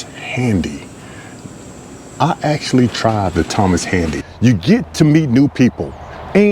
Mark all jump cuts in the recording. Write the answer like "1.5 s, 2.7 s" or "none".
4.2 s